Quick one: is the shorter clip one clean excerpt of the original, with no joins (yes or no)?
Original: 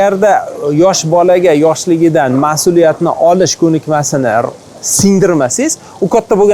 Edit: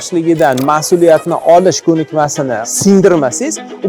no